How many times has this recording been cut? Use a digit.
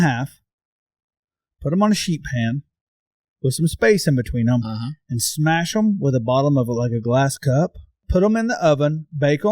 1